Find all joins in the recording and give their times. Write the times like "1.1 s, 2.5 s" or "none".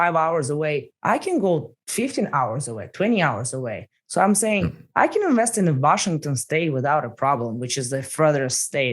0.9 s, 1.8 s